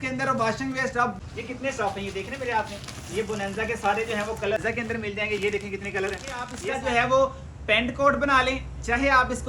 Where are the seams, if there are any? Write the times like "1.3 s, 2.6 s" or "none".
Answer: 1.1 s, 4.6 s, 6.6 s